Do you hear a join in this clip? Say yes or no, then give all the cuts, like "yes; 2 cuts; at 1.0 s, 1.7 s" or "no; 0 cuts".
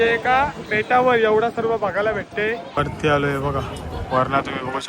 yes; 1 cut; at 2.7 s